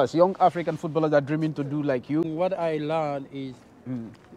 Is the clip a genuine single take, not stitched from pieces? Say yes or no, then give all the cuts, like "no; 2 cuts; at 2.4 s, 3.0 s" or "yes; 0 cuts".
yes; 0 cuts